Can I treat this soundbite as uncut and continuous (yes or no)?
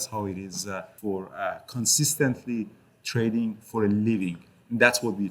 no